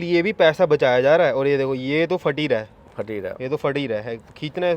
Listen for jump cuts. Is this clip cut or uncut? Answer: uncut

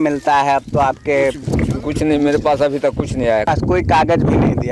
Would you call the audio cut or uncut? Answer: cut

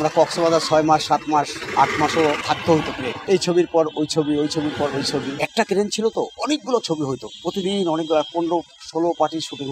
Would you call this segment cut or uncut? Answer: cut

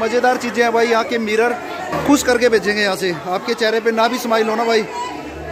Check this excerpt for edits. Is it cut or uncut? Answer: cut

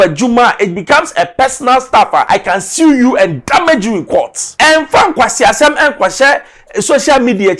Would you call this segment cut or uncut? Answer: cut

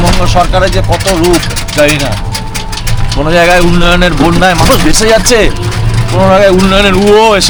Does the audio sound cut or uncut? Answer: uncut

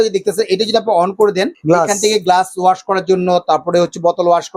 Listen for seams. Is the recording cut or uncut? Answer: cut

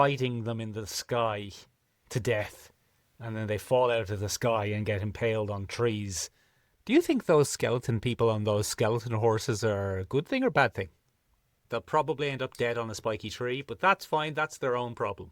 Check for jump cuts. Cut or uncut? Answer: cut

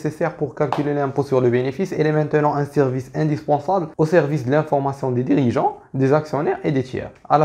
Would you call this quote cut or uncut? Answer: uncut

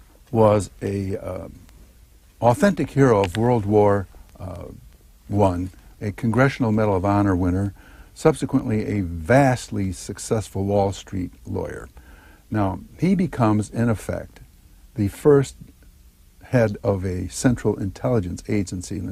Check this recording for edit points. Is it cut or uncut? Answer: uncut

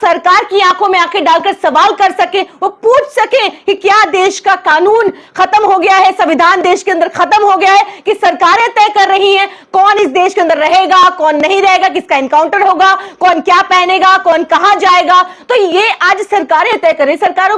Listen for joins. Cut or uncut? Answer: uncut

